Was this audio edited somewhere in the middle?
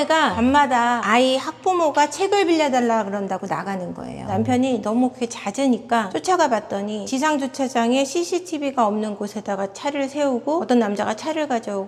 no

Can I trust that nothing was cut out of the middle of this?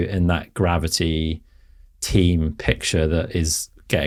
yes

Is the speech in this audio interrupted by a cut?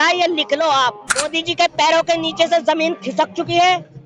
yes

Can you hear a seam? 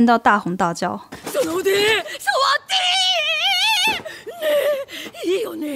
no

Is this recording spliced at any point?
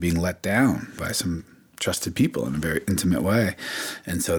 no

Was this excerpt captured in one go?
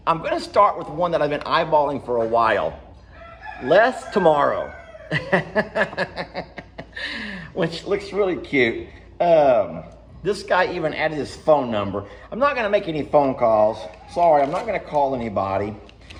yes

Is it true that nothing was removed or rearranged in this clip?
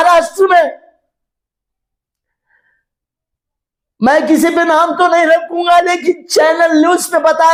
yes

